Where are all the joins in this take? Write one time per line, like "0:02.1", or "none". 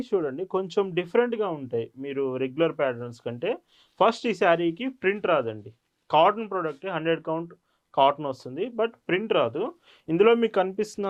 none